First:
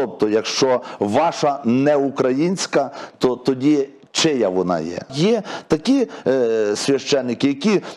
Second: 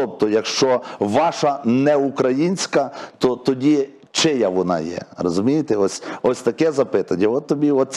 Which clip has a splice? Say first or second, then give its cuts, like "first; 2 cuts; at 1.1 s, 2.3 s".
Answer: first; 1 cut; at 5.1 s